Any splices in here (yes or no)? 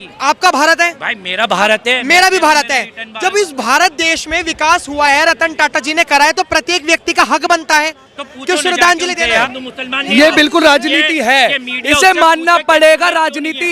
yes